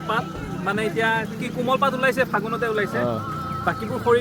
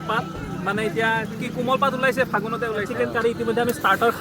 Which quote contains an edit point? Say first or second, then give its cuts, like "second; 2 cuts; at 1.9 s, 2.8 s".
second; 1 cut; at 2.9 s